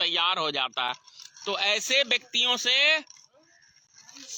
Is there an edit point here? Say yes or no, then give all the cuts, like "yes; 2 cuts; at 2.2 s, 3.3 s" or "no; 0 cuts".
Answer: no; 0 cuts